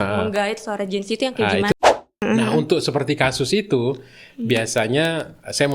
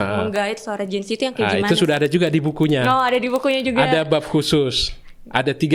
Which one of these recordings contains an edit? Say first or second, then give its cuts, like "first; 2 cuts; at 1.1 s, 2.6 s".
first; 1 cut; at 1.7 s